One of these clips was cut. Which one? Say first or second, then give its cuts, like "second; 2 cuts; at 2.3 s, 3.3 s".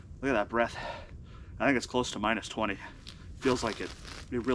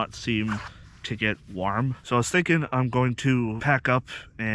second; 2 cuts; at 2.0 s, 3.6 s